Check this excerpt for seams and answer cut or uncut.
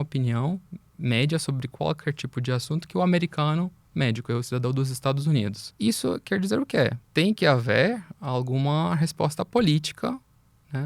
cut